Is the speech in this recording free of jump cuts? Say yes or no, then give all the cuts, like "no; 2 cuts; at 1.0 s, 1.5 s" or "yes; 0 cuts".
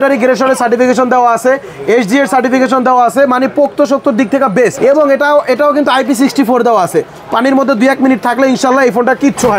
yes; 0 cuts